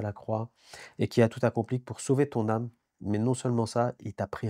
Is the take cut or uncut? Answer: uncut